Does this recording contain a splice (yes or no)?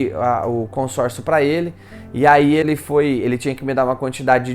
yes